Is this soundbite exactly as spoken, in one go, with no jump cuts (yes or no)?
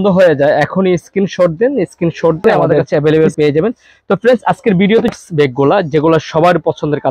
no